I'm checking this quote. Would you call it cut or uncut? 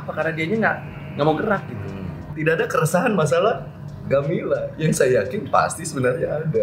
cut